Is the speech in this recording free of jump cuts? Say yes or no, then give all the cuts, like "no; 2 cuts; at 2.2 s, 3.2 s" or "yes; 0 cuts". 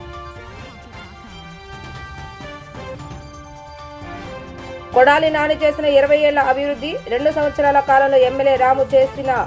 yes; 0 cuts